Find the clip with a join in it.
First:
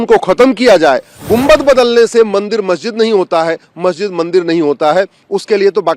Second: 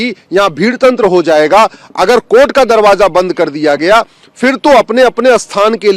first; 1 cut; at 1.1 s

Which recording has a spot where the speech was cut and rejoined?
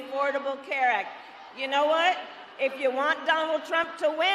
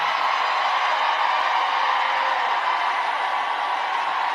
second; 1 cut; at 2.4 s

